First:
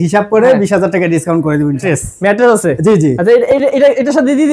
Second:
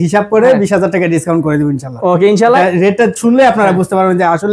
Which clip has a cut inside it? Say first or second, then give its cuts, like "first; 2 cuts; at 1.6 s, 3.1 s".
first; 1 cut; at 1.9 s